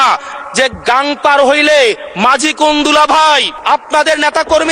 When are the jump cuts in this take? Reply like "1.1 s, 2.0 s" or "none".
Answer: 3.5 s